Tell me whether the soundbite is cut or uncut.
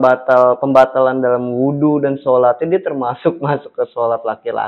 uncut